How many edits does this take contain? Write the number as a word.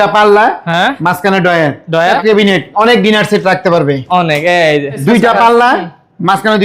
two